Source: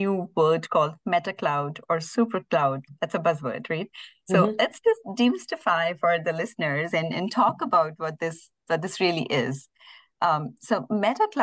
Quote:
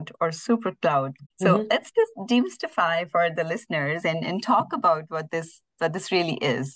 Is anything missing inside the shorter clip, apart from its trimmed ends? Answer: yes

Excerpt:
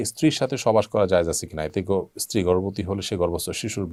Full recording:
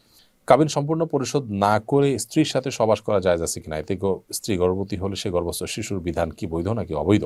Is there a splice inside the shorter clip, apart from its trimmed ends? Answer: no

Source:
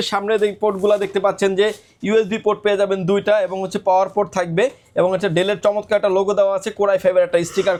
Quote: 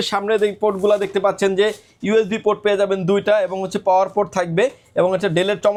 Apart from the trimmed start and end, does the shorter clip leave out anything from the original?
no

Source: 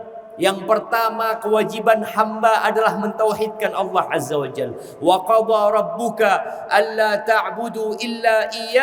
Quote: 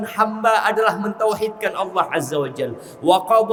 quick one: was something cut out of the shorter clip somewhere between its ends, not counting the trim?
no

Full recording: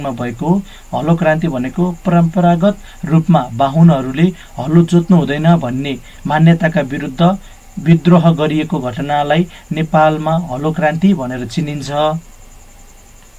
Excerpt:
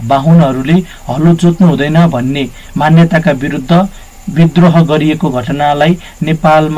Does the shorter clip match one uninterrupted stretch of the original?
yes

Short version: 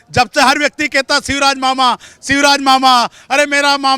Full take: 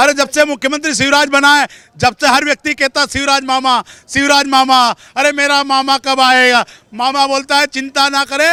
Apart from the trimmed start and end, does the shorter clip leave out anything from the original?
no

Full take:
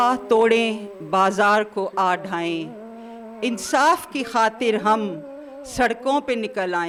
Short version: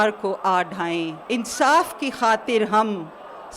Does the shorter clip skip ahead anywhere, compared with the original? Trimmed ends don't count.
yes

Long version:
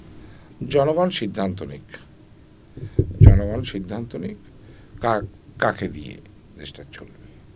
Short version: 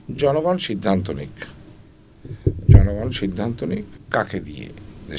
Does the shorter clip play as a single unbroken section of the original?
no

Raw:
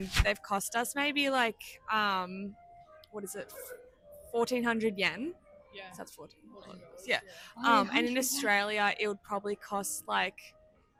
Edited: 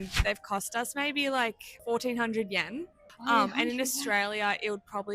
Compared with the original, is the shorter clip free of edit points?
no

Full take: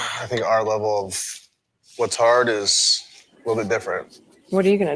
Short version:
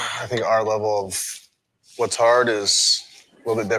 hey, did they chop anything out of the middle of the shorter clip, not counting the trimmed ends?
no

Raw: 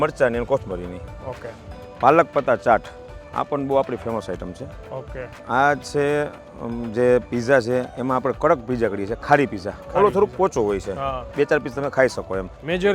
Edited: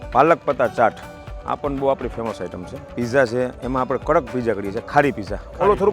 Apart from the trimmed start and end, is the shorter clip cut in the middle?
yes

